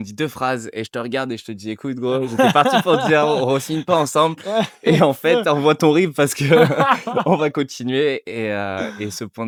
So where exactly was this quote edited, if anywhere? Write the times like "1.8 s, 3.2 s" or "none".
none